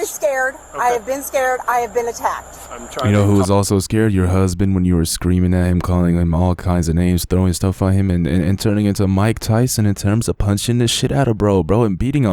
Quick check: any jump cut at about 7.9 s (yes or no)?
no